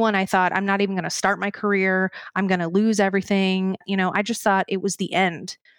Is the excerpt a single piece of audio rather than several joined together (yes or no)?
no